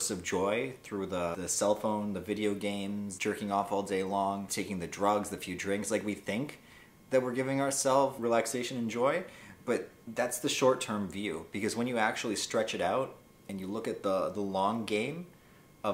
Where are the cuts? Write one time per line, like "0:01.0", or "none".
0:01.3
0:03.1
0:04.5
0:08.2
0:10.0

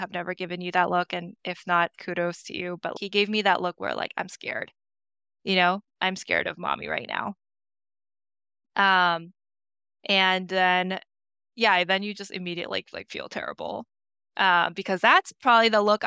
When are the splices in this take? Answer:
0:02.9

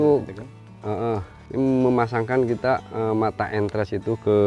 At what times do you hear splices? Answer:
0:01.4

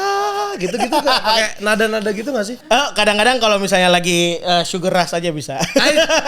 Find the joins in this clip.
0:02.6

